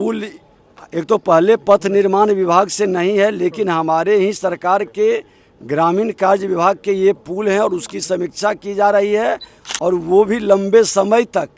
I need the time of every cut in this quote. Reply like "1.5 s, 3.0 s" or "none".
none